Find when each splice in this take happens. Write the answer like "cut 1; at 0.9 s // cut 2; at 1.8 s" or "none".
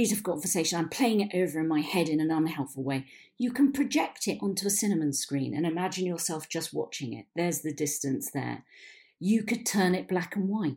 none